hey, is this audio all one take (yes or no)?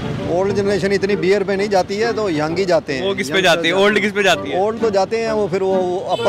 yes